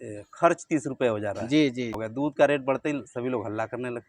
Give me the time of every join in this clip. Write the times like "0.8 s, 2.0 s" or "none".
2.0 s